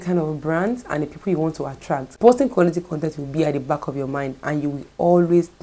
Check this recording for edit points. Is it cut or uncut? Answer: uncut